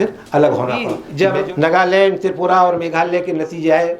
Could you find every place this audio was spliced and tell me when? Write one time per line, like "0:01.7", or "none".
0:01.0

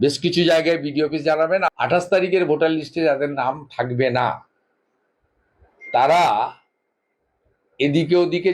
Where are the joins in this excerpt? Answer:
0:01.7

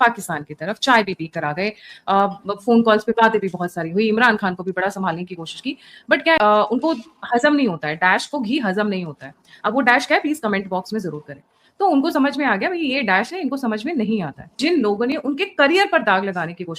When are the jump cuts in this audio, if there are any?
none

